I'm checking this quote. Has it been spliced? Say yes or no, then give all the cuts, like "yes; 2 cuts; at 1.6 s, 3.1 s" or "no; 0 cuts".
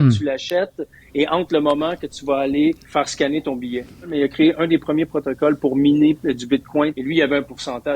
yes; 3 cuts; at 2.8 s, 4.1 s, 7.0 s